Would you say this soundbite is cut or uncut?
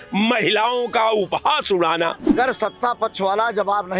cut